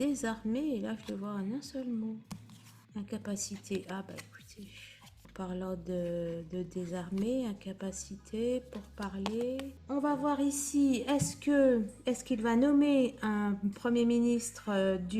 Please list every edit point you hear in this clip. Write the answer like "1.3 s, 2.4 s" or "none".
9.7 s